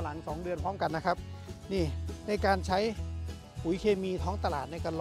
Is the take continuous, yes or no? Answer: yes